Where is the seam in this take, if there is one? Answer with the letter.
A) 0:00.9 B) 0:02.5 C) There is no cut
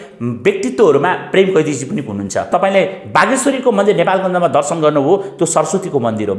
B